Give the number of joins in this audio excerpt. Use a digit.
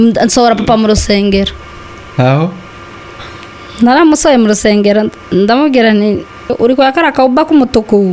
1